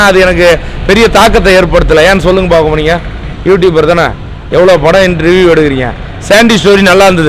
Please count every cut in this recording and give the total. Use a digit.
0